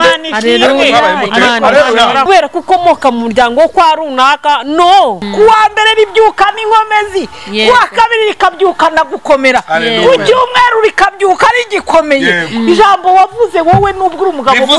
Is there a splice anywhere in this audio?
yes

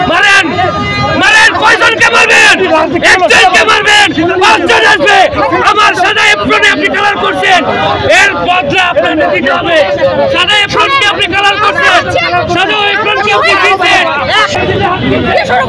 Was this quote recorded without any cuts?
no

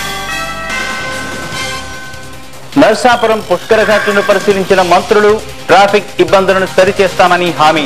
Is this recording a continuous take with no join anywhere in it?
yes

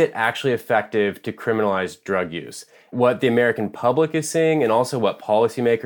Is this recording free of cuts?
no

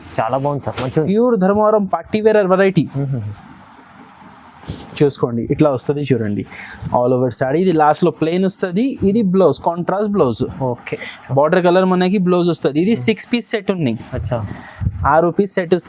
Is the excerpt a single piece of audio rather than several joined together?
yes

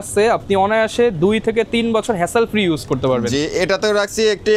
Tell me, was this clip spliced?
no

